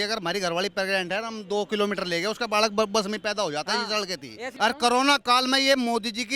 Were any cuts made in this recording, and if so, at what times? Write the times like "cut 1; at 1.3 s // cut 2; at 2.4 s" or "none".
cut 1; at 4.5 s